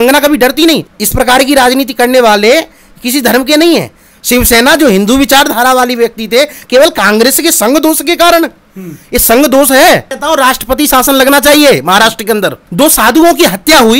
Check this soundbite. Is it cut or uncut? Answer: cut